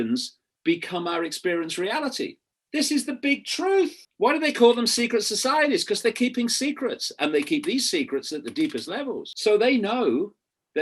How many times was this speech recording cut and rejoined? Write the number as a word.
two